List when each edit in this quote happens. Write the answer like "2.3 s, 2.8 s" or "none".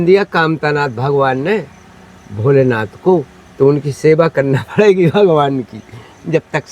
3.4 s